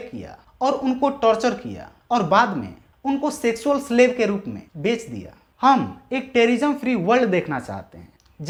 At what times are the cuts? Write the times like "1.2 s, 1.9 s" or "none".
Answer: none

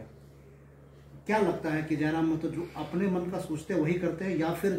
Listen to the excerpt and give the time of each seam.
none

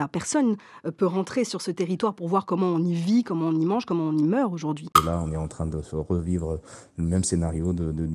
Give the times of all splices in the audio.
4.9 s

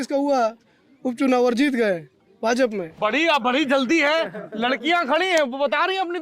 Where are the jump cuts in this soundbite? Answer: 2.9 s

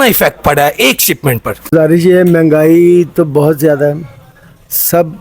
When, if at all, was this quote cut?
1.7 s

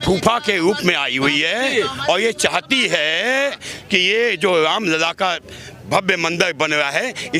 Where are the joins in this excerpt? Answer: none

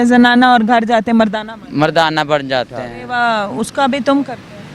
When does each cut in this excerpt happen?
3.0 s

